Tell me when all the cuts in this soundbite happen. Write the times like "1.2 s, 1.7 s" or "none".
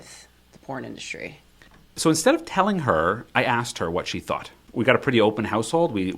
4.6 s